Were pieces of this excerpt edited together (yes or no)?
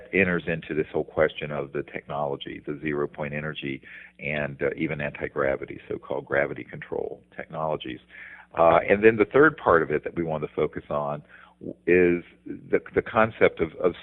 yes